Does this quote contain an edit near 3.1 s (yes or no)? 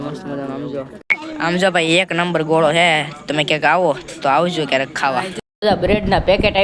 no